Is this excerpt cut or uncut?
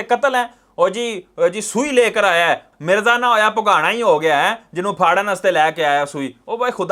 uncut